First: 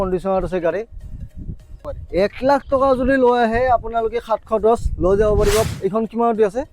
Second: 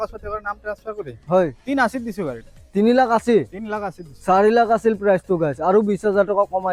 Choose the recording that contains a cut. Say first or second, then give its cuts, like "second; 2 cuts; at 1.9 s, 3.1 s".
first; 2 cuts; at 1.9 s, 5.7 s